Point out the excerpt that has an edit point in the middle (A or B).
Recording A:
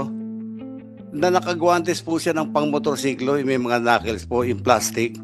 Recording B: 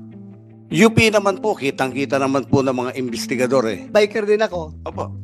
B